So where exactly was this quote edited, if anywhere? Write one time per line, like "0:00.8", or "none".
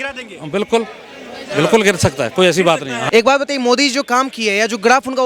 0:03.0